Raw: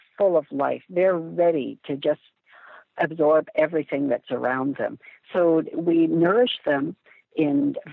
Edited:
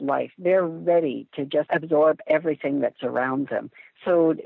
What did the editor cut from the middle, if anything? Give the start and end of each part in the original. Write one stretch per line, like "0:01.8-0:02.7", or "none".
0:02.2-0:02.9